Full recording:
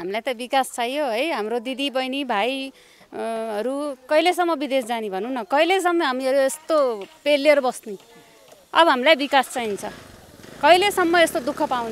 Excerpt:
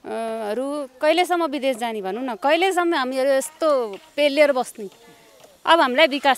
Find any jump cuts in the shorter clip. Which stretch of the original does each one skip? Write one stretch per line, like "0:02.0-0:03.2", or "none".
none

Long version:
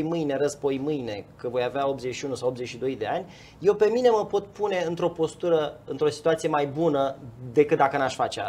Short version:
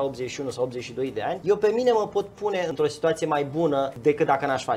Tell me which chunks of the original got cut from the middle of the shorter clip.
0:03.2-0:03.6
0:04.9-0:05.9
0:07.2-0:07.5

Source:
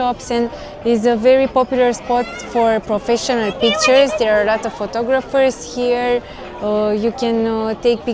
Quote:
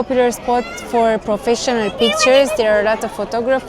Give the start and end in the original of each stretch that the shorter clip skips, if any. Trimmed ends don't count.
none

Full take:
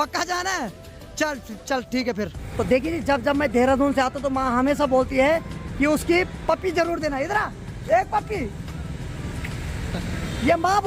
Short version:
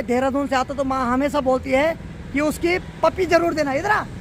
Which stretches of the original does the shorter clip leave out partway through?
none

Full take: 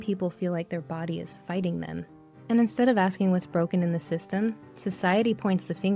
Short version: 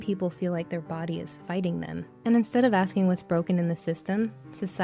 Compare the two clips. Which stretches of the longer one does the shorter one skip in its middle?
0:02.1-0:02.3

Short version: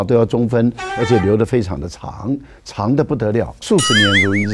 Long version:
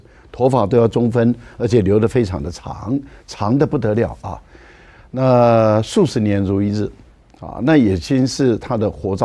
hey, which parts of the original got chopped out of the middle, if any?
0:04.2-0:05.9

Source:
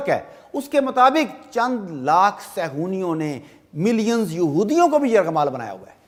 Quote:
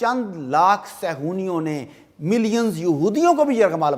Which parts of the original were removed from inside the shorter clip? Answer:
none

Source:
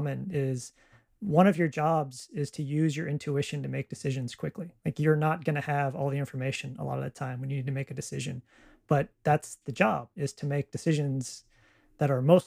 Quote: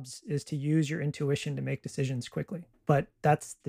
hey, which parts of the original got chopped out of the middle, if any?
0:04.7-0:08.7

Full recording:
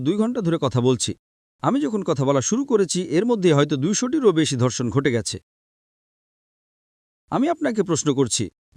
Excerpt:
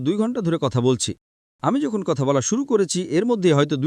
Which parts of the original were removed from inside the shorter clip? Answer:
none

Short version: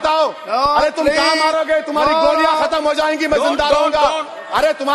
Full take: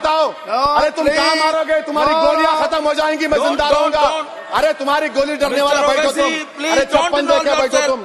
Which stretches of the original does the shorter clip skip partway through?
none

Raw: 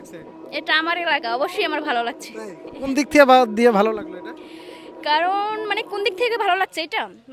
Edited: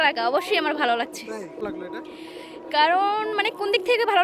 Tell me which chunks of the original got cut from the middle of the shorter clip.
0:02.8-0:04.0

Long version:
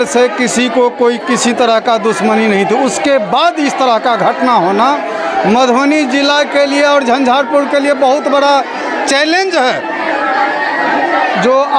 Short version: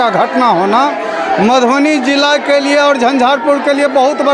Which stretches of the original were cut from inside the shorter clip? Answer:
none

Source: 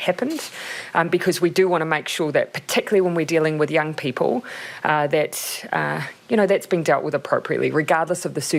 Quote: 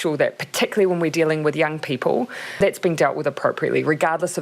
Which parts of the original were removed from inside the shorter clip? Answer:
0:04.7-0:06.5

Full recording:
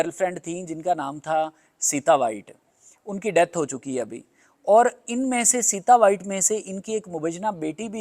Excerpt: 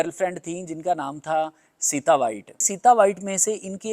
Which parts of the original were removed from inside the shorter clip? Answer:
0:02.6-0:05.6

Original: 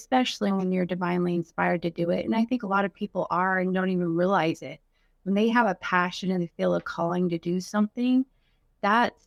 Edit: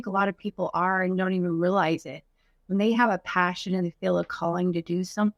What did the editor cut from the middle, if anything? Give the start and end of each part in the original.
none

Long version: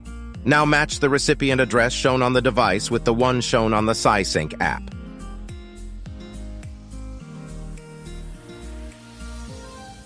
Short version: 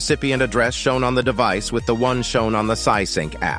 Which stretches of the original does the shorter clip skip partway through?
none

